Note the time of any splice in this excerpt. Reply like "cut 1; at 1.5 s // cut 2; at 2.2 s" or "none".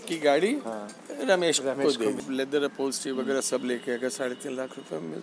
cut 1; at 2.2 s